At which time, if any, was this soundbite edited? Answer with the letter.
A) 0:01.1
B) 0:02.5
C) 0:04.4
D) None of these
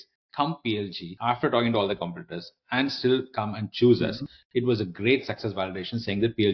A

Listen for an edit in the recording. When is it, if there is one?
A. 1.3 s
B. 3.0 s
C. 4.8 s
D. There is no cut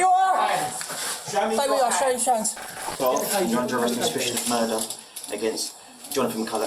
B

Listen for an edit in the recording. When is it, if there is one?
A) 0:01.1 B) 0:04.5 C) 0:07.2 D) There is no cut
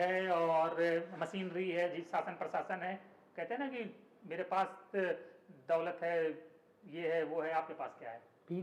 D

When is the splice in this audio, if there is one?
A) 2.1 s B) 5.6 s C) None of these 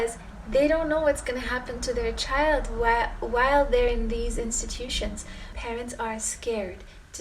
B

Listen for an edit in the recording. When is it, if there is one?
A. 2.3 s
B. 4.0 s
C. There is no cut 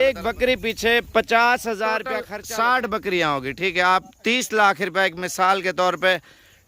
A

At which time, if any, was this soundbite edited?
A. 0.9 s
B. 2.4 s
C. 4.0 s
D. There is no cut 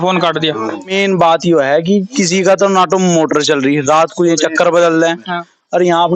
A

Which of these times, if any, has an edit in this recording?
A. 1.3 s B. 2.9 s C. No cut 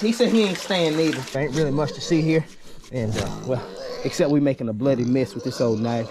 A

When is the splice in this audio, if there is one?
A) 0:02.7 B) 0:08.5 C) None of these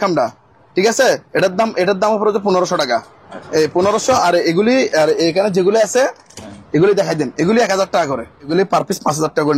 B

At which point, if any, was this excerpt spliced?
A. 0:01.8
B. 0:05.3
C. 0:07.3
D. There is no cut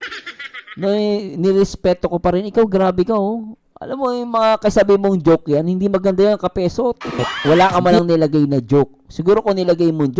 C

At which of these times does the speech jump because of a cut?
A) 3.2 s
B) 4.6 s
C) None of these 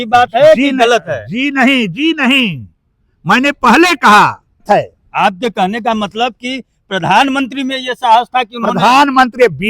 B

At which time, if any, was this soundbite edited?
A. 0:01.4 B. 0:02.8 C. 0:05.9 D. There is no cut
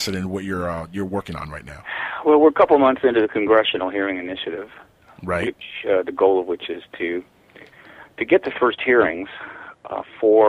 D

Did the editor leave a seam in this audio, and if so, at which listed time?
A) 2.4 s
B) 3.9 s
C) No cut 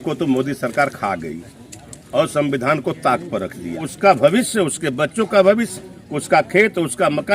B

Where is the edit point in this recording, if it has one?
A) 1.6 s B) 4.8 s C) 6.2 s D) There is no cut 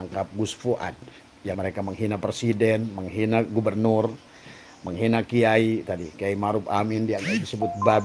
A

